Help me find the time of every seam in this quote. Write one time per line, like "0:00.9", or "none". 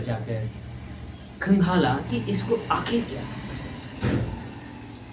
none